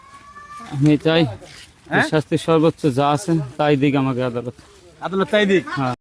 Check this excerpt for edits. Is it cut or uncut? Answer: uncut